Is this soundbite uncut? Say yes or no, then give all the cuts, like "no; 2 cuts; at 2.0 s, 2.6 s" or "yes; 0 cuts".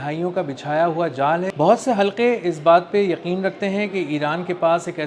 no; 1 cut; at 1.5 s